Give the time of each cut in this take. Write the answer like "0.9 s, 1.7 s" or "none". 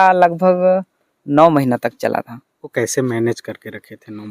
2.6 s